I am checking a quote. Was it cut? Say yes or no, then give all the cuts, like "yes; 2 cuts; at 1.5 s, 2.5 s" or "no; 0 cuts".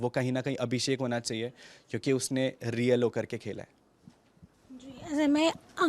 no; 0 cuts